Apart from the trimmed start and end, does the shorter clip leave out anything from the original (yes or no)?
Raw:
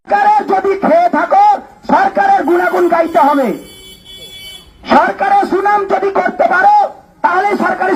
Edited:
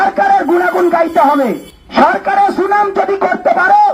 yes